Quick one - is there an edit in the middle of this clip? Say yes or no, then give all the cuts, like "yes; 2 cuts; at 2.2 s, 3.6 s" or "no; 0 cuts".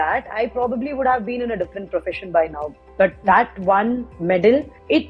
no; 0 cuts